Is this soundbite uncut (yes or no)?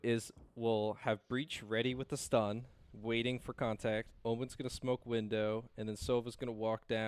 yes